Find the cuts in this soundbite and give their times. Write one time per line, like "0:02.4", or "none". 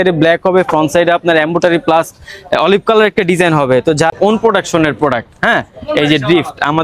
0:04.1